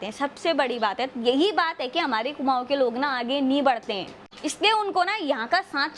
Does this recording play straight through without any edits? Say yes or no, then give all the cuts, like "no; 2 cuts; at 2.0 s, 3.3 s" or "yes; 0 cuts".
yes; 0 cuts